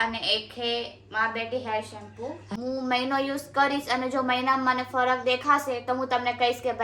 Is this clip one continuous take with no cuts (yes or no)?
no